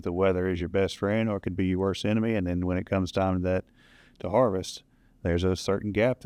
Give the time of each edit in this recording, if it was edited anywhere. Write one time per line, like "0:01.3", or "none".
none